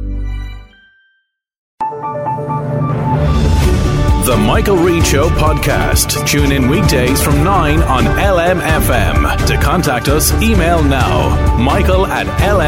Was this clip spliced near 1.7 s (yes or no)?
yes